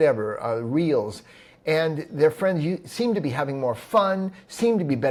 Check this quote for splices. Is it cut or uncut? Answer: uncut